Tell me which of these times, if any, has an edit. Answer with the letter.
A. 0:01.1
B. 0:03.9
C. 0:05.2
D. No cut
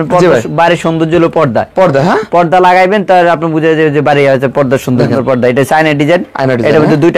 C